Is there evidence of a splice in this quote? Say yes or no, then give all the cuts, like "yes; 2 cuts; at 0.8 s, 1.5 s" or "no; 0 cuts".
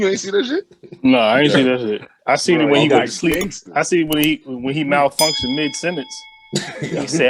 no; 0 cuts